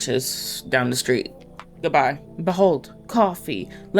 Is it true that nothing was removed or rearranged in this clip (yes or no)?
no